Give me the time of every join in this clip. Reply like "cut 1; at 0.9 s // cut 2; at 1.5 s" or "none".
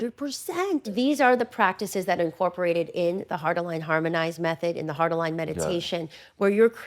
cut 1; at 0.9 s